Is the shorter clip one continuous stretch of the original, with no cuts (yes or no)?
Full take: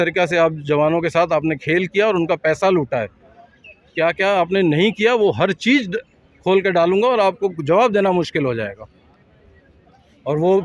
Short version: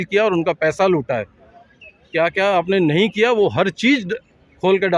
yes